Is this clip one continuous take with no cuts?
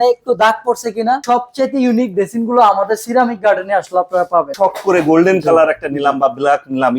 no; 2 cuts; at 1.2 s, 4.5 s

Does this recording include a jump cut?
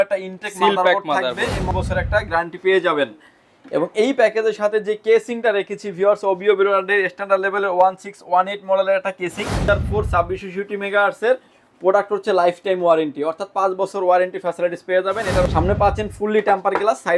yes; 3 cuts; at 1.7 s, 9.7 s, 15.4 s

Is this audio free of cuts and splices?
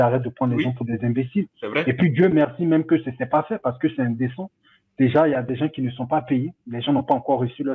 yes; 0 cuts

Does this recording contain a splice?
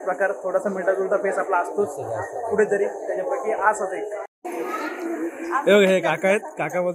yes; 1 cut; at 4.3 s

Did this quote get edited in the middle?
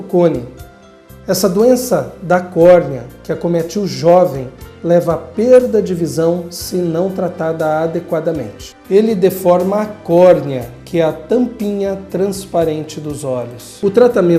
no; 0 cuts

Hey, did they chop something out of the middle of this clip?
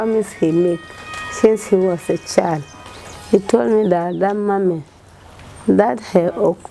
no; 0 cuts

